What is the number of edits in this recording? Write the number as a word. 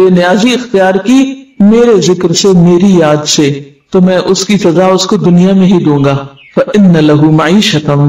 one